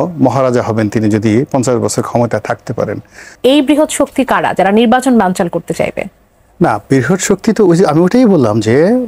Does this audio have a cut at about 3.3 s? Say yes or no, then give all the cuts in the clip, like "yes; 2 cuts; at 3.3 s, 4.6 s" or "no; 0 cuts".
yes; 1 cut; at 3.3 s